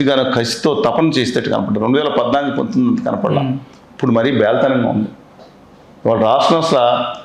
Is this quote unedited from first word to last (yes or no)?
yes